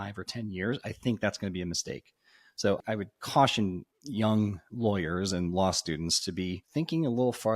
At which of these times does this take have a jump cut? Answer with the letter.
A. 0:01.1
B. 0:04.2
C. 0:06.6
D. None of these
C